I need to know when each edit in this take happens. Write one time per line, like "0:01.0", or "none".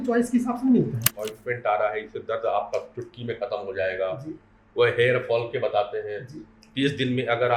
0:01.0